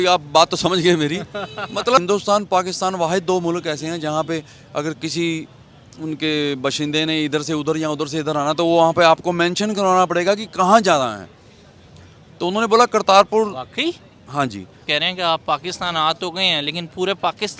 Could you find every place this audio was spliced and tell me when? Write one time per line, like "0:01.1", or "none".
0:02.0
0:14.8